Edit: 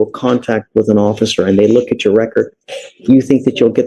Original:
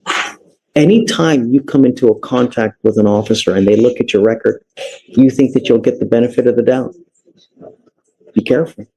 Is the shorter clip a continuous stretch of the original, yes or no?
yes